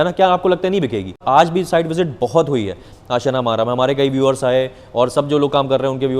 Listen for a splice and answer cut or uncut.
cut